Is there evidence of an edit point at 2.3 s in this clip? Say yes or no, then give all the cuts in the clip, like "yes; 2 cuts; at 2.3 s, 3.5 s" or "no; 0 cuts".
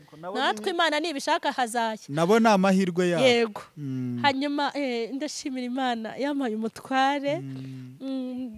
no; 0 cuts